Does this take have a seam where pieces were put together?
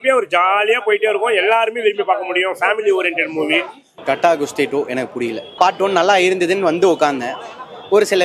yes; 2 cuts; at 3.9 s, 5.4 s

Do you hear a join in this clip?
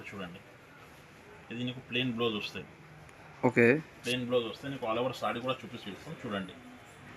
no; 0 cuts

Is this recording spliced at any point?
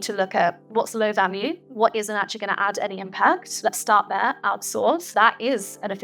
yes; 3 cuts; at 1.6 s, 3.5 s, 5.0 s

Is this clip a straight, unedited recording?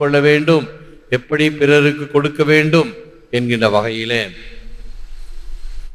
yes; 0 cuts

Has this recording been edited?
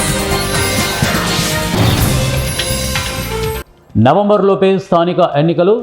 yes; 1 cut; at 3.6 s

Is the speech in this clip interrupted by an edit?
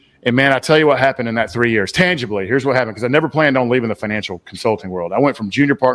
no; 0 cuts

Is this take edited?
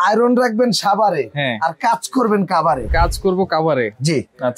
no; 0 cuts

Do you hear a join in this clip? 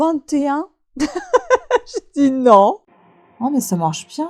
yes; 1 cut; at 2.9 s

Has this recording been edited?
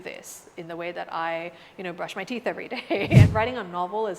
yes; 1 cut; at 3.3 s

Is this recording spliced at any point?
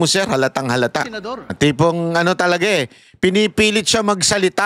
yes; 1 cut; at 1.5 s

